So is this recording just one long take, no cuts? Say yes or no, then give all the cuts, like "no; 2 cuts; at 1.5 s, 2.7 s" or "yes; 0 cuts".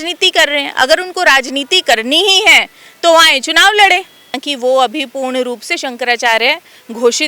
no; 1 cut; at 4.5 s